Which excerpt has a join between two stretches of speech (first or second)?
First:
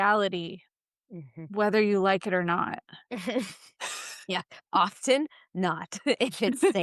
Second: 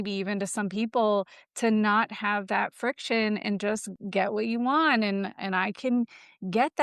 second